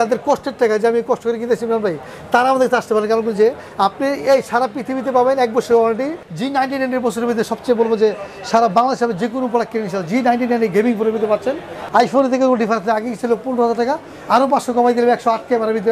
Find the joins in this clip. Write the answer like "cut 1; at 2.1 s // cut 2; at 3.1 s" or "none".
cut 1; at 6.2 s // cut 2; at 11.8 s